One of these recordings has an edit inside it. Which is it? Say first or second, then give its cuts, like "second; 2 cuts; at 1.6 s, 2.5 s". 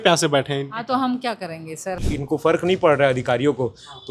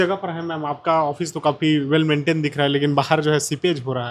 first; 1 cut; at 2.0 s